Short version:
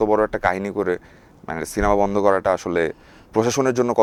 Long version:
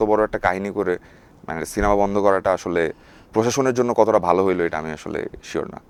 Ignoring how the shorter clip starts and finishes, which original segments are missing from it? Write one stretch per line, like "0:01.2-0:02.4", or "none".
none